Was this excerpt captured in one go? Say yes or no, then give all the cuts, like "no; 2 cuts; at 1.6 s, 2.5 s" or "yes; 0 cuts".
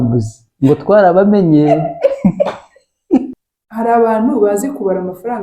no; 1 cut; at 3.3 s